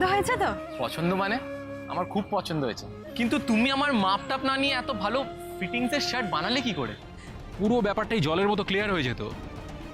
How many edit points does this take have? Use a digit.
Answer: 1